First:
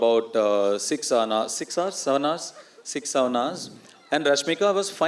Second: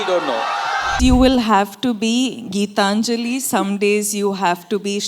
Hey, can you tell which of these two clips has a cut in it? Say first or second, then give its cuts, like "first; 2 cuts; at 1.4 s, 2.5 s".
second; 1 cut; at 0.9 s